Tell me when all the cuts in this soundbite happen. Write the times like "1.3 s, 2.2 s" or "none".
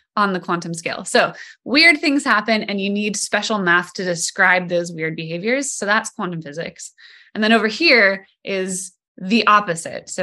none